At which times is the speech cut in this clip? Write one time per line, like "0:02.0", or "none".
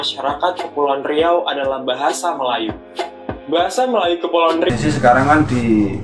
0:04.7